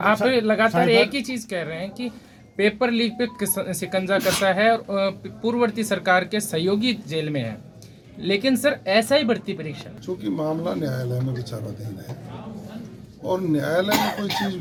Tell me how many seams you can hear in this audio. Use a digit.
0